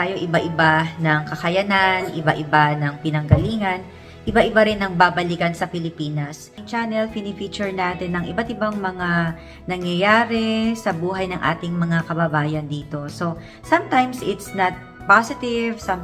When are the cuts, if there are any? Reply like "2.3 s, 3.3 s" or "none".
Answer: 6.6 s